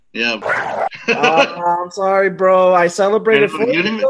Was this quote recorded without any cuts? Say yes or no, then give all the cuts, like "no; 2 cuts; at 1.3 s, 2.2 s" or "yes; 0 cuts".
yes; 0 cuts